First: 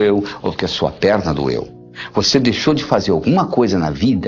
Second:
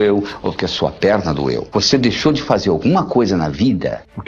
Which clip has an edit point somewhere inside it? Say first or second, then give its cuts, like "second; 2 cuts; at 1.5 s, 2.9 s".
second; 1 cut; at 1.6 s